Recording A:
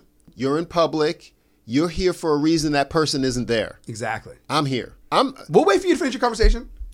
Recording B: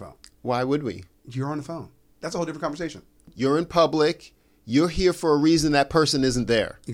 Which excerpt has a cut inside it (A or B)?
A